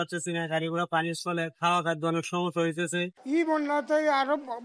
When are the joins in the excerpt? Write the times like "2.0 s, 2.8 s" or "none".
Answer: none